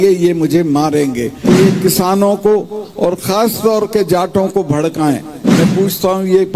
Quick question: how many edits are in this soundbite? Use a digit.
2